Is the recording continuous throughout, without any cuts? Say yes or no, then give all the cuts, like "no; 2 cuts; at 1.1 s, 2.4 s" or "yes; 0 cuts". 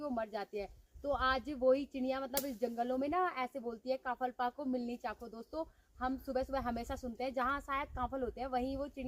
yes; 0 cuts